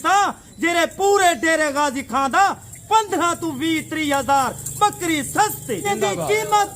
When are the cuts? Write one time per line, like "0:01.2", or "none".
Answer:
0:05.8